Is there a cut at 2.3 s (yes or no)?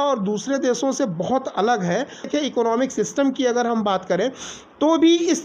yes